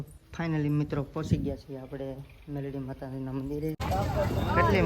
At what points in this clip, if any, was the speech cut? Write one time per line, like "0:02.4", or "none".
0:03.8